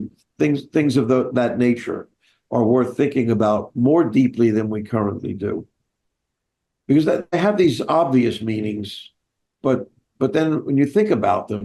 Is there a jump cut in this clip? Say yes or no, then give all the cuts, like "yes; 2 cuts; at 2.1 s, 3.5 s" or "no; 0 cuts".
no; 0 cuts